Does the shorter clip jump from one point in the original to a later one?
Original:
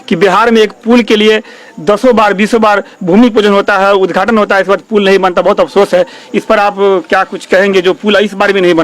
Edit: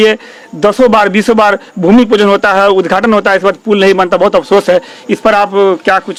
no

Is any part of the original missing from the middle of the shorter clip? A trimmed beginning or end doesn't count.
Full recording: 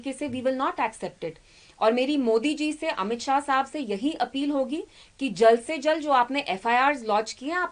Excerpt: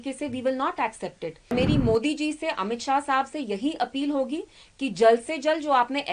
yes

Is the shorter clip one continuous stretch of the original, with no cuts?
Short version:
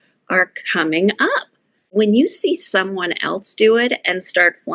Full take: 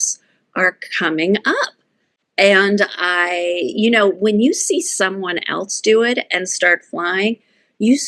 no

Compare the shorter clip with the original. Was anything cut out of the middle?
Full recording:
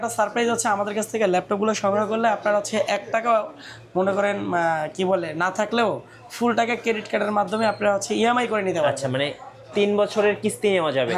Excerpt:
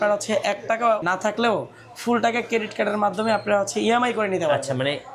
yes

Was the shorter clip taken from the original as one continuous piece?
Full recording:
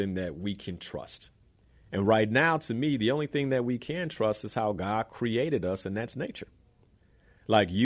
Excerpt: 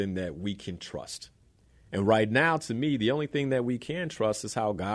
yes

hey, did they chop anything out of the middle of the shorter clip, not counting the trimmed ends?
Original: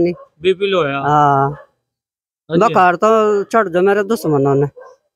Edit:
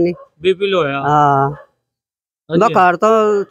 no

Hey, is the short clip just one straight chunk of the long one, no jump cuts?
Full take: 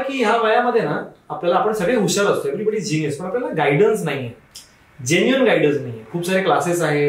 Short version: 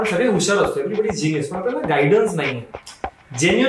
yes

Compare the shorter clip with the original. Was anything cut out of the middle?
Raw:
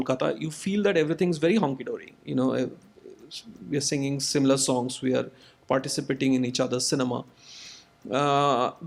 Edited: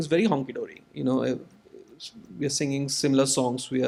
no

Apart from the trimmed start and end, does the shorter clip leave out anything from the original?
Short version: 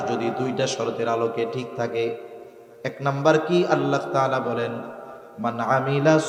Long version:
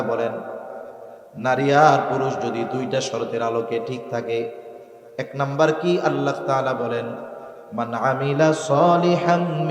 no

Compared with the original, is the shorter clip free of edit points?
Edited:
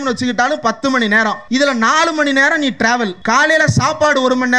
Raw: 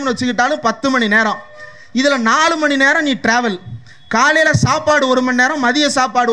no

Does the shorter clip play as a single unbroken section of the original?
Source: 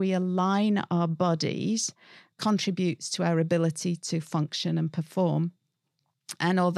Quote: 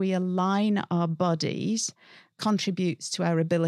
yes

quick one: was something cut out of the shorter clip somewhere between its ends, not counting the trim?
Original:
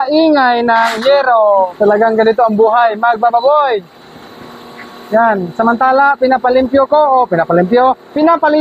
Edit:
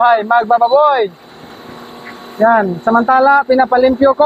no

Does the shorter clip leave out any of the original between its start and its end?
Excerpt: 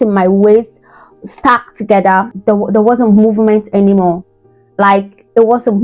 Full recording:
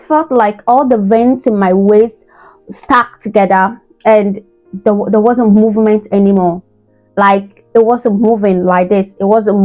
yes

